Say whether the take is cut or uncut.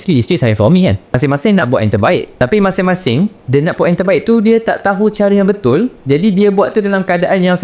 cut